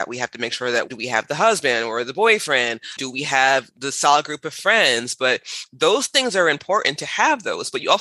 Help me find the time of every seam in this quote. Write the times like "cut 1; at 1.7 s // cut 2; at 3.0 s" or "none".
cut 1; at 0.9 s // cut 2; at 3.0 s